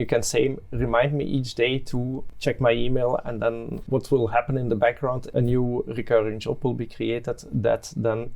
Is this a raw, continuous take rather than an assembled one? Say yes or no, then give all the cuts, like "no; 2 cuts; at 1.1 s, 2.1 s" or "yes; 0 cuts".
no; 3 cuts; at 2.2 s, 3.8 s, 5.3 s